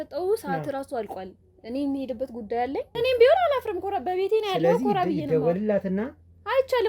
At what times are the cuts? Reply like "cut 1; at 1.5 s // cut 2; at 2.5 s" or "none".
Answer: cut 1; at 2.9 s